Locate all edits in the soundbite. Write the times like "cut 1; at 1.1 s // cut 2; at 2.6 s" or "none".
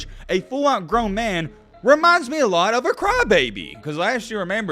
cut 1; at 3.7 s